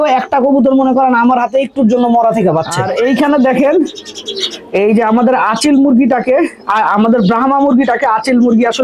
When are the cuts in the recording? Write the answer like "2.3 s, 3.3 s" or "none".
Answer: none